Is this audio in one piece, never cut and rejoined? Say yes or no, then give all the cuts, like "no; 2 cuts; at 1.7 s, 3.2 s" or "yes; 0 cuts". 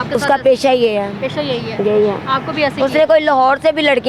yes; 0 cuts